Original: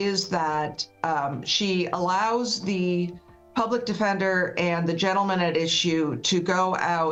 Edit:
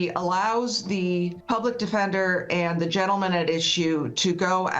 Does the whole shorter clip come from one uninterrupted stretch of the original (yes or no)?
no